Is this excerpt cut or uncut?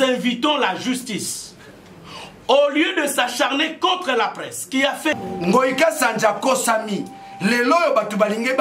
cut